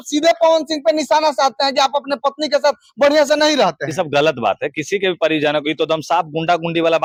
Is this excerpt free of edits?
yes; 0 cuts

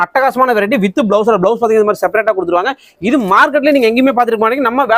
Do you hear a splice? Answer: no; 0 cuts

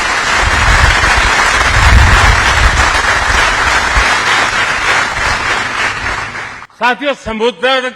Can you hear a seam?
yes; 1 cut; at 6.6 s

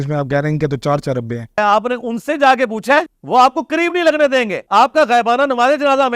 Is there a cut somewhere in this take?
yes; 3 cuts; at 1.6 s, 3.1 s, 4.6 s

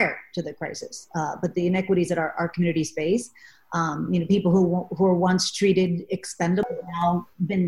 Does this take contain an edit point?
yes; 1 cut; at 6.6 s

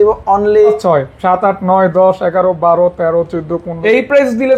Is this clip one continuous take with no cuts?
no; 2 cuts; at 0.8 s, 3.6 s

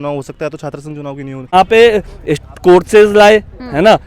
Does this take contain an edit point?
yes; 1 cut; at 1.5 s

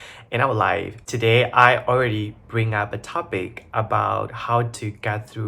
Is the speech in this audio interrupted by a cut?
yes; 1 cut; at 1.0 s

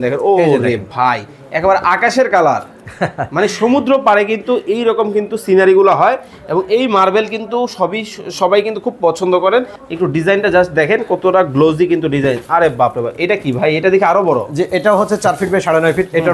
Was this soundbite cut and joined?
yes; 1 cut; at 9.8 s

